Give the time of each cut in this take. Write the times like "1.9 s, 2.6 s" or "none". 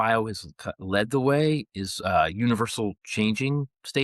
none